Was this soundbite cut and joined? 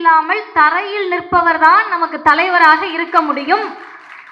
no; 0 cuts

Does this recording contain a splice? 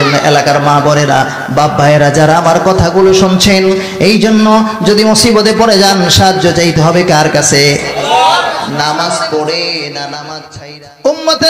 yes; 1 cut; at 10.5 s

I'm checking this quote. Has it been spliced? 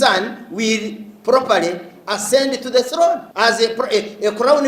yes; 1 cut; at 3.3 s

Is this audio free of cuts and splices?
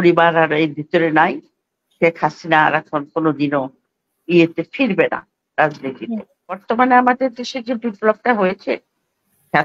no; 1 cut; at 6.6 s

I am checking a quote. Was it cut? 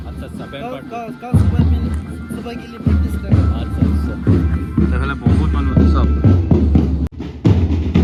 no; 0 cuts

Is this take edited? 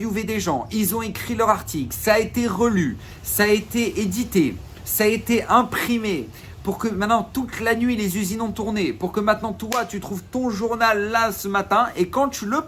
no; 0 cuts

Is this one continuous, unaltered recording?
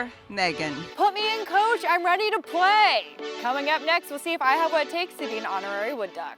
no; 2 cuts; at 0.8 s, 3.2 s

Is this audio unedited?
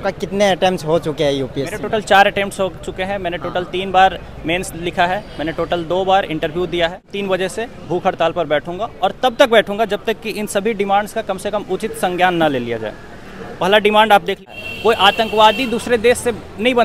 no; 2 cuts; at 7.1 s, 14.4 s

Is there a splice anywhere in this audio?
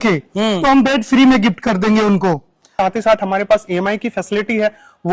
yes; 1 cut; at 2.7 s

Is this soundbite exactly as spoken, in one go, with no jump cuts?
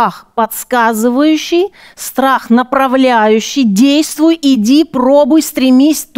yes; 0 cuts

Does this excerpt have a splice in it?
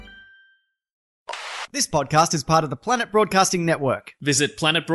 yes; 1 cut; at 1.1 s

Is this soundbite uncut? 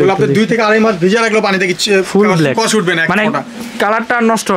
yes; 0 cuts

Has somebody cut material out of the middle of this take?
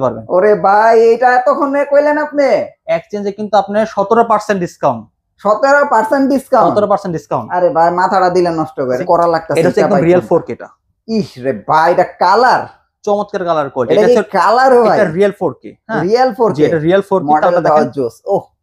yes; 1 cut; at 9.0 s

